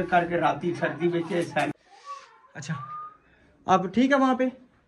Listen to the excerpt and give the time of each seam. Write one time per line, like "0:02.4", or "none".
0:01.8